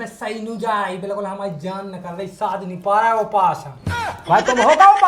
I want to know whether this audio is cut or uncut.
uncut